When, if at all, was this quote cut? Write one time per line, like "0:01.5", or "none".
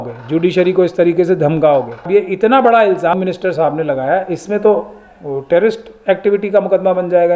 0:02.0
0:03.1